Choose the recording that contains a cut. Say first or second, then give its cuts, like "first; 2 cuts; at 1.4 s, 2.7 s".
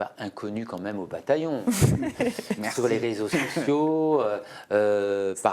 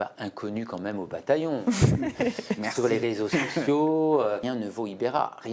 second; 1 cut; at 4.4 s